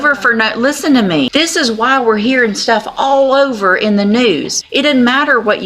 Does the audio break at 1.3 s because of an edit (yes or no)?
yes